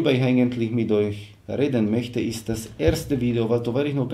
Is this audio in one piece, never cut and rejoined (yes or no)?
yes